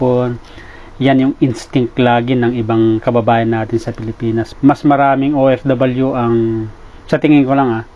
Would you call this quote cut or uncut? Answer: cut